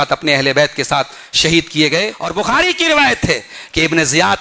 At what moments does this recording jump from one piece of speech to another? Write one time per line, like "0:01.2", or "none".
0:02.2